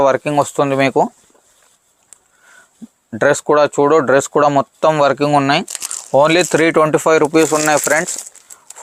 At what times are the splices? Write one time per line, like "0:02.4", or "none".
none